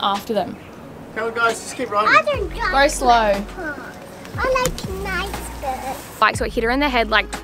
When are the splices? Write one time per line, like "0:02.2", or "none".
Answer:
0:06.2

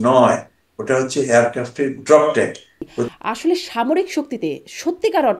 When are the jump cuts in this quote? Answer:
0:03.1

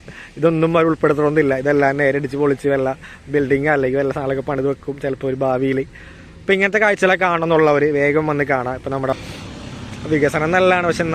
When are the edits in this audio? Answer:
0:09.1

